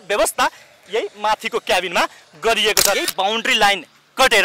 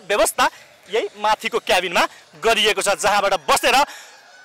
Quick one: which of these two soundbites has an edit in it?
first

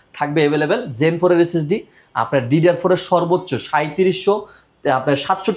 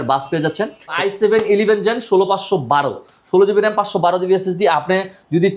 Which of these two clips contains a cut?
second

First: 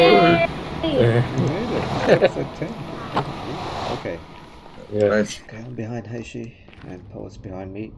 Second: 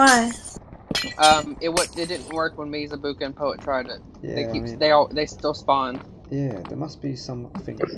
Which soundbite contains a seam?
first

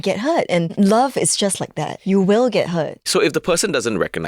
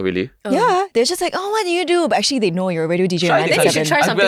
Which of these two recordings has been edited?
first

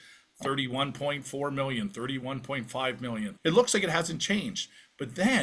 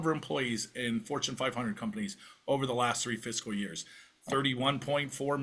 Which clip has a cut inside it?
first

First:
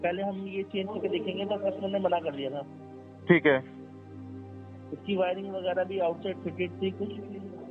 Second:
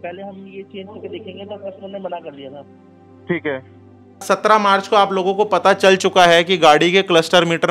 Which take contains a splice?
second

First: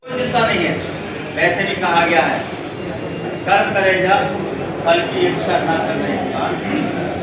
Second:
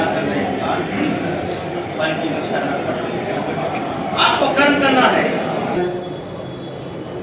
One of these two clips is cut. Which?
second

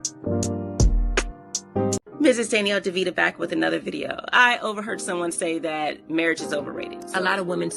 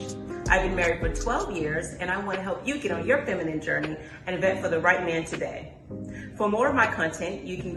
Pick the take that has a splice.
first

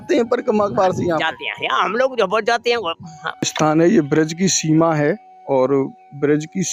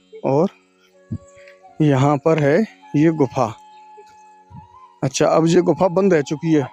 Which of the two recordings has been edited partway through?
first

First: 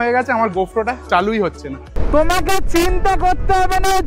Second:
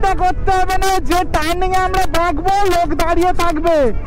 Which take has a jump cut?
first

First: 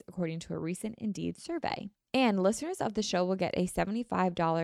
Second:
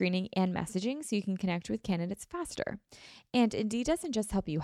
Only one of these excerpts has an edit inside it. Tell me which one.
first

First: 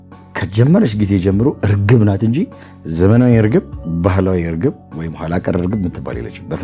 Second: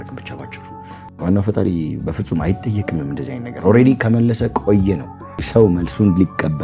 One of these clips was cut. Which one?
second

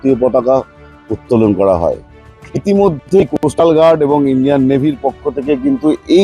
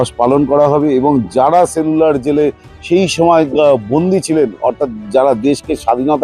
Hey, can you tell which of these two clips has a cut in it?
first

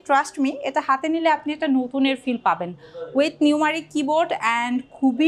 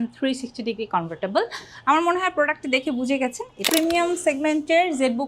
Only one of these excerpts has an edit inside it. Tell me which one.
second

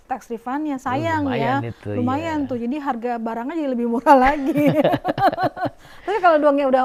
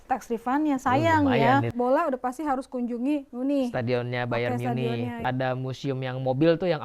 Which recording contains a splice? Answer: second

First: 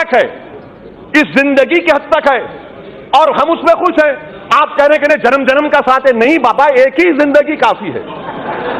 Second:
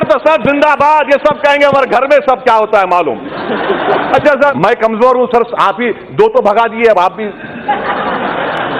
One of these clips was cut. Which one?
second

